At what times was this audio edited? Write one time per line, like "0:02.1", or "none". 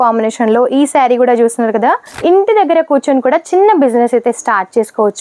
0:02.1